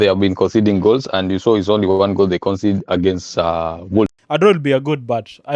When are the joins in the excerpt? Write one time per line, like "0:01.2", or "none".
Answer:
0:04.2